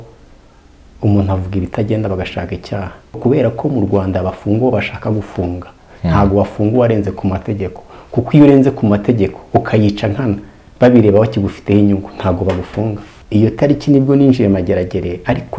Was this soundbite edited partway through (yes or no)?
yes